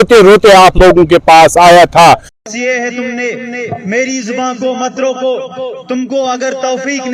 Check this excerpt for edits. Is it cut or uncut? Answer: cut